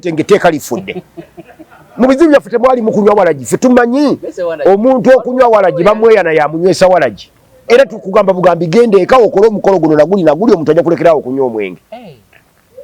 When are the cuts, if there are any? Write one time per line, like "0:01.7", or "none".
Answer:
none